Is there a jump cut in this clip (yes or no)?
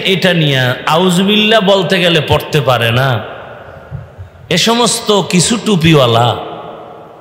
no